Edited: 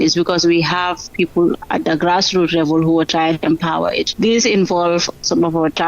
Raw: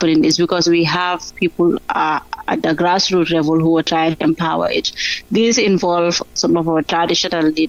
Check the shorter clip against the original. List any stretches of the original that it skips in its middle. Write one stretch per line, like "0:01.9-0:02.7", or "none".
0:01.8-0:02.4
0:04.8-0:05.2